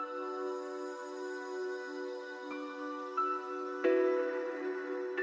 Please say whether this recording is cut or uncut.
uncut